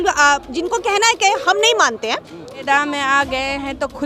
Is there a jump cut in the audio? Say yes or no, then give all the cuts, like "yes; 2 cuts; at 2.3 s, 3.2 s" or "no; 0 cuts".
yes; 1 cut; at 2.5 s